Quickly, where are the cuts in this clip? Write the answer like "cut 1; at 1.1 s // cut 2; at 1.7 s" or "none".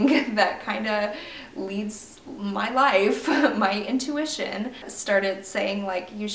cut 1; at 4.9 s